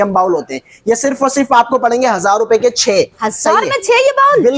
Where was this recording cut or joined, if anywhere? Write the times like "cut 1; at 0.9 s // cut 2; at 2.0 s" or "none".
none